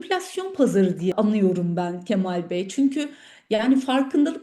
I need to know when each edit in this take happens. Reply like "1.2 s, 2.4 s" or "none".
1.1 s